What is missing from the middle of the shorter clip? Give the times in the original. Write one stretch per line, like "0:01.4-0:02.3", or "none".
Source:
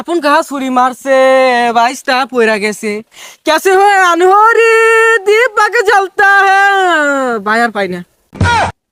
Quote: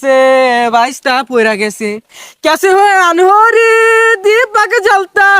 none